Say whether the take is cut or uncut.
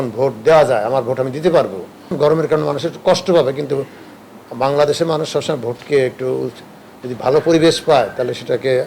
cut